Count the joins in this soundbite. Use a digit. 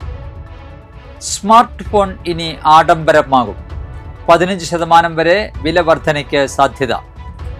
1